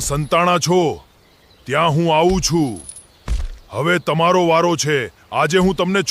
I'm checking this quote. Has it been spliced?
no; 0 cuts

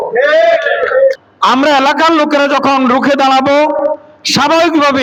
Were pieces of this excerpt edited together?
no; 0 cuts

